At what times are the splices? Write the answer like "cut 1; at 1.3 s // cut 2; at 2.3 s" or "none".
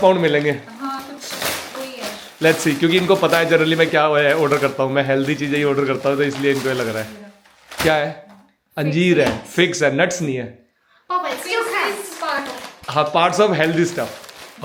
none